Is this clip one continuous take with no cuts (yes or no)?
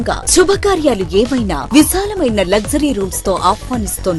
yes